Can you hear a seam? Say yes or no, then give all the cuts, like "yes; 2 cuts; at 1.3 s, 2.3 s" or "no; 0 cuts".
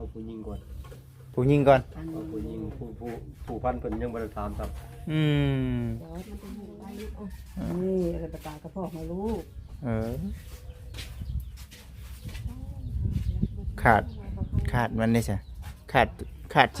yes; 1 cut; at 6.0 s